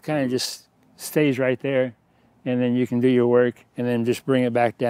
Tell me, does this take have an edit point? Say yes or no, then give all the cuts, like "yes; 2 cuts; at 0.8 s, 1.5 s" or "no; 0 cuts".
no; 0 cuts